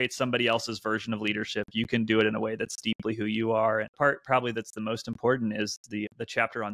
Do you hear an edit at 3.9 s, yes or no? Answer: yes